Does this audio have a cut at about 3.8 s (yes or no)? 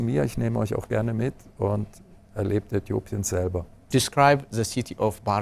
yes